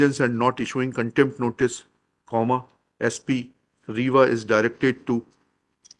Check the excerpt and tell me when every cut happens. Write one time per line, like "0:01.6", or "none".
none